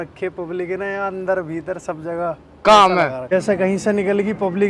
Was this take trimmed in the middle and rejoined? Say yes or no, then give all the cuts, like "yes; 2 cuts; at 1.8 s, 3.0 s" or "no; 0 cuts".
yes; 1 cut; at 3.2 s